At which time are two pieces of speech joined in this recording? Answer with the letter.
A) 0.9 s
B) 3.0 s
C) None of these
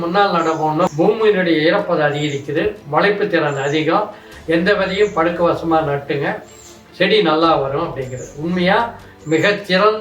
A